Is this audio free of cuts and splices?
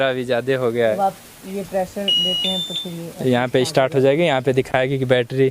no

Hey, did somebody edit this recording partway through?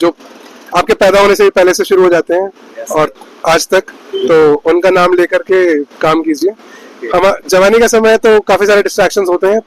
no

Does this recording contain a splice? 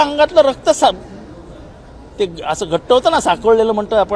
no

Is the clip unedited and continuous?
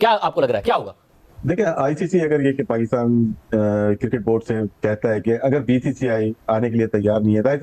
yes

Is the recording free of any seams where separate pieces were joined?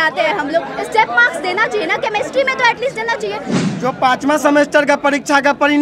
no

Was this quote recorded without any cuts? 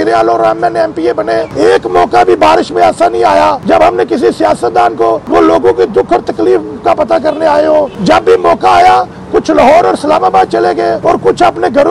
no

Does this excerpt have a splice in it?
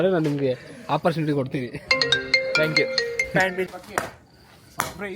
yes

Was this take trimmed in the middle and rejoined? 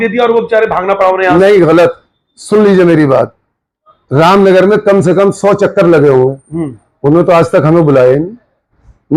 no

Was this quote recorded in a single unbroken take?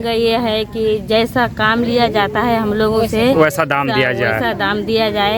yes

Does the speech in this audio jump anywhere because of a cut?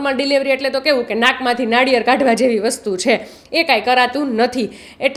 no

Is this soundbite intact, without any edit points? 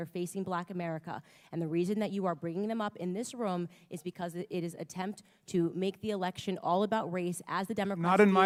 yes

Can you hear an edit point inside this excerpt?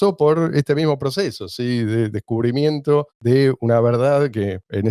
no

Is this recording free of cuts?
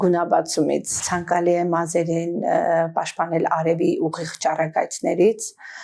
no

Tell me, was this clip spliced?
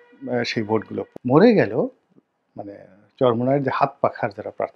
yes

